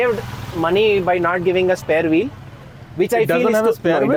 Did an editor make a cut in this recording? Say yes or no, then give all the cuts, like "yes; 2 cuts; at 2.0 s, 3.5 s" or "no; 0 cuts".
no; 0 cuts